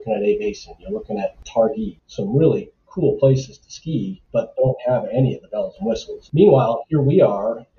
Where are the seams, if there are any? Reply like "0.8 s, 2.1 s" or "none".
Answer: 1.9 s, 4.5 s, 6.1 s